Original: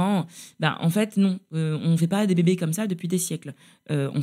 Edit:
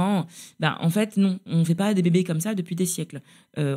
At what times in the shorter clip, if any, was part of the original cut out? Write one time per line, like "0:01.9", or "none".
0:01.4